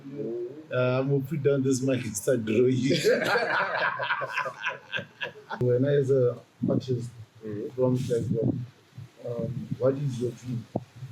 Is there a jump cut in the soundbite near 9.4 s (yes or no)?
no